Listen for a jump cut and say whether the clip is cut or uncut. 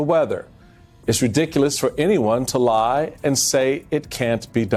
uncut